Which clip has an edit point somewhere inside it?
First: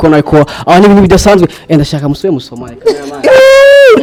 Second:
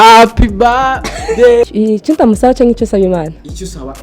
second; 1 cut; at 1.6 s

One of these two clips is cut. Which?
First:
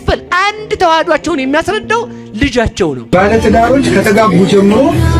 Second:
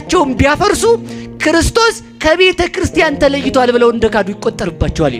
first; 1 cut; at 3.0 s

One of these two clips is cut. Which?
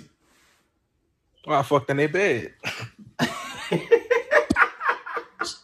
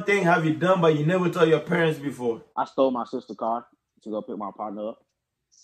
second; 1 cut; at 2.5 s

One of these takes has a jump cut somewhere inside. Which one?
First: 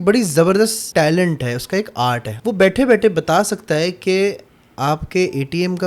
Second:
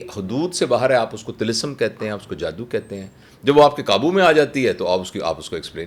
first; 2 cuts; at 0.9 s, 2.3 s

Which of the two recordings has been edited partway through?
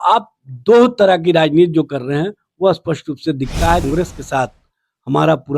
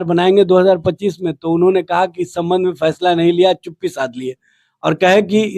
first; 1 cut; at 3.8 s

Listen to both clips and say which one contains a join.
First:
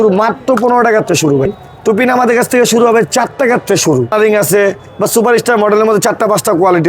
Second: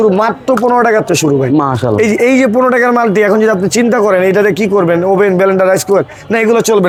first; 2 cuts; at 1.5 s, 4.1 s

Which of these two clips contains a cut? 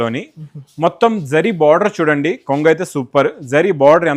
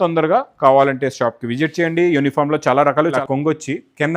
second; 1 cut; at 3.2 s

